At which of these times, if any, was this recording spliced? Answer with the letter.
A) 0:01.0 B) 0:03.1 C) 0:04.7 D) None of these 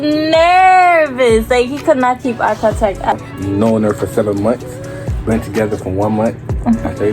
B